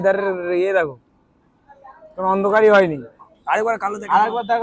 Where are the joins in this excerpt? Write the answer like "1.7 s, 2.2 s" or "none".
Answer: none